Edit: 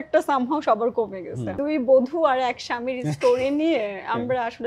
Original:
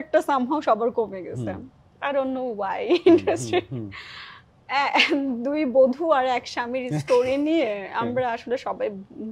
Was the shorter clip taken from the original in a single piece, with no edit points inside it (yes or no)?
no